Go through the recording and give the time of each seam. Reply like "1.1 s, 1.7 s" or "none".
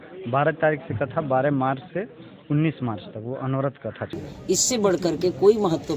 4.2 s